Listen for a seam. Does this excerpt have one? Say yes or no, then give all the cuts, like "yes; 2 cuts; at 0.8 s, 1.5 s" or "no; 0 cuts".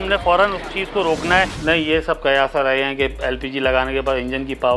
yes; 1 cut; at 1.5 s